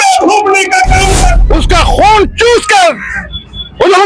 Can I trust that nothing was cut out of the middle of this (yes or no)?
no